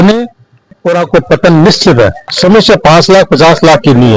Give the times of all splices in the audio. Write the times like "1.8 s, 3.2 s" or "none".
2.3 s